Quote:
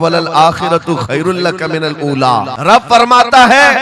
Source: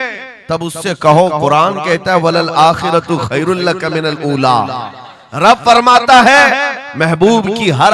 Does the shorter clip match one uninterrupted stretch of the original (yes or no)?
no